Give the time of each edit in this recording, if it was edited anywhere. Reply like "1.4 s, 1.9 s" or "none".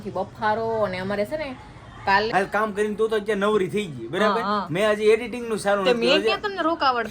2.3 s